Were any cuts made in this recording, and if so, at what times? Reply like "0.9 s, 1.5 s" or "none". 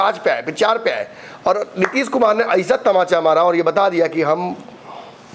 none